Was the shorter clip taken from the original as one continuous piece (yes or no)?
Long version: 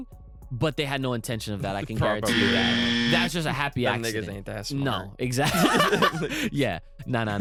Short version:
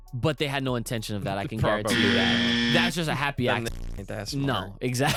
yes